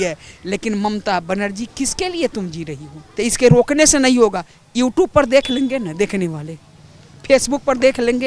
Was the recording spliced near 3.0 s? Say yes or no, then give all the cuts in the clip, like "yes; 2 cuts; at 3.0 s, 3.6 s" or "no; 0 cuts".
yes; 1 cut; at 3.0 s